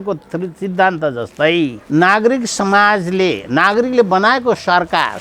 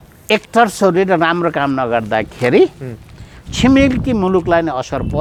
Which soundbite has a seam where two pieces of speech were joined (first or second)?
first